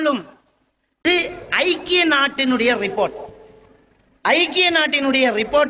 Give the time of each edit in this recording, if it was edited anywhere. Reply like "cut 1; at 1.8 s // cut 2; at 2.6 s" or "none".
cut 1; at 1.0 s